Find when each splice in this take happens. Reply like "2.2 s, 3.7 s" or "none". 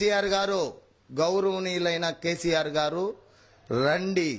none